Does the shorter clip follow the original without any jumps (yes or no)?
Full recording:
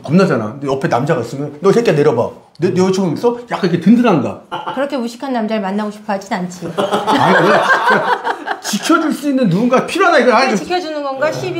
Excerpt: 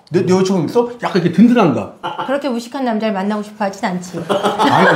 yes